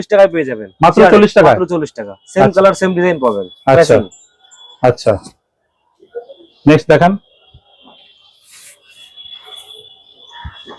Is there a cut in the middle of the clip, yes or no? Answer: no